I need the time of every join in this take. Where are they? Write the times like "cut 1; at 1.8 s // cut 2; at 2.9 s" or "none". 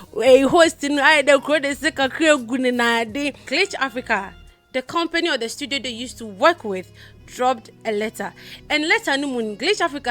cut 1; at 3.4 s

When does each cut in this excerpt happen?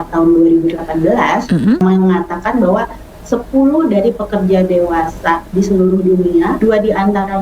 cut 1; at 1.8 s // cut 2; at 6.6 s

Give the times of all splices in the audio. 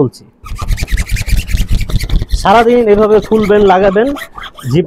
none

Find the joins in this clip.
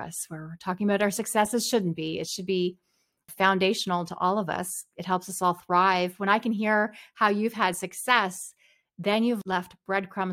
cut 1; at 3.3 s // cut 2; at 9.4 s

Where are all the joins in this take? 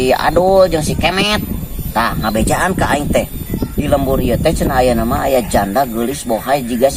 none

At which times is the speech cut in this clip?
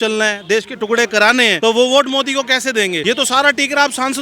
cut 1; at 1.6 s // cut 2; at 3.0 s

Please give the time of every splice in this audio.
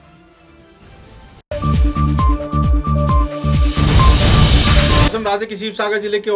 cut 1; at 1.4 s // cut 2; at 5.1 s

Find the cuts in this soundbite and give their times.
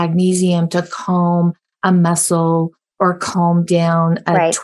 none

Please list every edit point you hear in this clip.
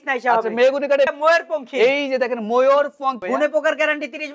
cut 1; at 1.1 s // cut 2; at 3.2 s

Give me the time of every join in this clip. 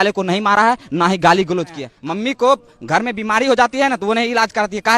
cut 1; at 1.9 s

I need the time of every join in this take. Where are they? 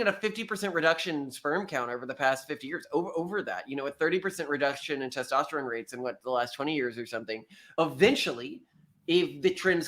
cut 1; at 7.6 s

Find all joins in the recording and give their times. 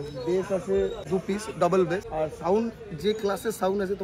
cut 1; at 1.0 s // cut 2; at 2.1 s

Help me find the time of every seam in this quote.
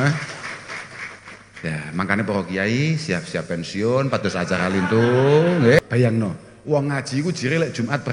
cut 1; at 5.7 s

